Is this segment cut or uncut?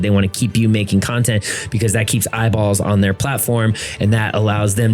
uncut